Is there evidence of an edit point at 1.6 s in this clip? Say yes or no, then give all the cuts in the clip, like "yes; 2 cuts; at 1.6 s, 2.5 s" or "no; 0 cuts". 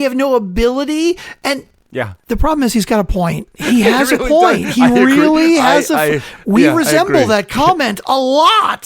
yes; 1 cut; at 1.6 s